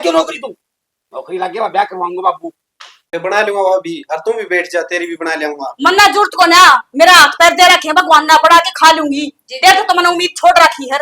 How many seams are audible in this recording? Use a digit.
1